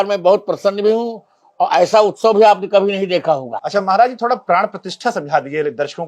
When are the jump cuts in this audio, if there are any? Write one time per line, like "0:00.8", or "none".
0:03.6